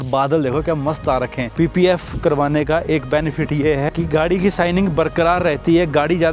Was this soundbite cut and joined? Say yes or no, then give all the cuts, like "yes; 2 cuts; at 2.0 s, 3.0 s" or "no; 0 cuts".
yes; 1 cut; at 1.5 s